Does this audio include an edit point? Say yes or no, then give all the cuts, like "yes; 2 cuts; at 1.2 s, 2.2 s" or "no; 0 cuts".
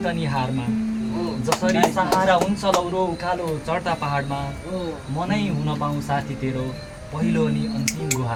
no; 0 cuts